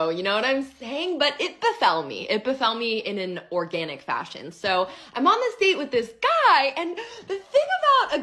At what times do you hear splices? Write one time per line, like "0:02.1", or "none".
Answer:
0:01.2